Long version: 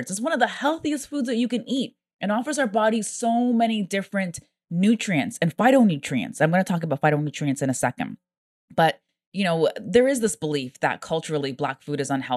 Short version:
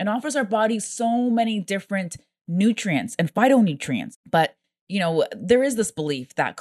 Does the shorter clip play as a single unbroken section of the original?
no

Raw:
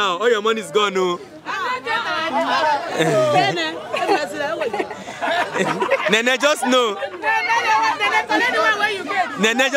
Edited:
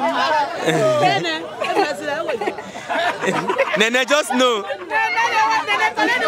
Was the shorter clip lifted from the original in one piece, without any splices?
yes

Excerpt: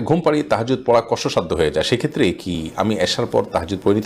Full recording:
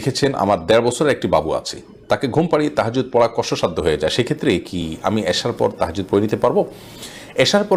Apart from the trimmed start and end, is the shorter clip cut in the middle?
no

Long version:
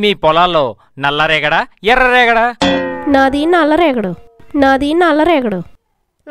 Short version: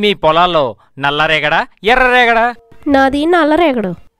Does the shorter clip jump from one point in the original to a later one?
yes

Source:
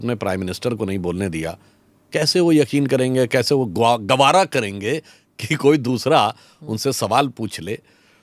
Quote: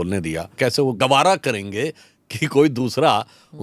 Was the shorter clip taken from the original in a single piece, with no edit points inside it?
no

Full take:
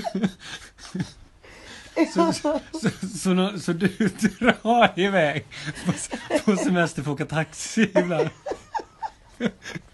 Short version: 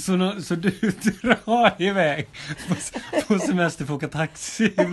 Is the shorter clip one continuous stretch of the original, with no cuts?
yes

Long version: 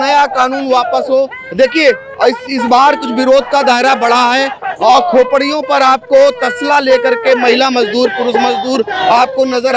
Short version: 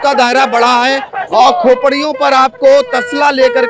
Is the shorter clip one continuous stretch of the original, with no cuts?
yes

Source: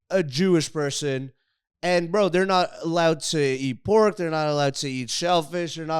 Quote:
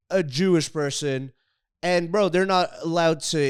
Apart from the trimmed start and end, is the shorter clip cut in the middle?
no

